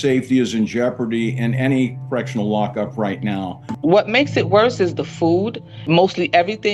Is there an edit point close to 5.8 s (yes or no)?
no